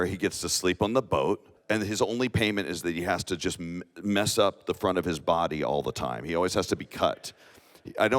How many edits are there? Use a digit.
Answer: 1